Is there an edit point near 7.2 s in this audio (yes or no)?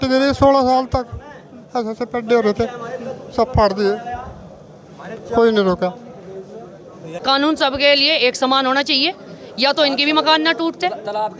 yes